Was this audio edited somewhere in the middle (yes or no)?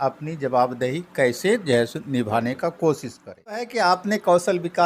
yes